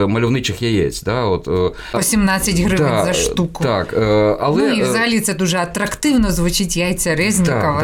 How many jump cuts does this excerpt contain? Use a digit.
0